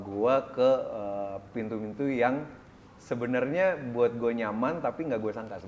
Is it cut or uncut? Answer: uncut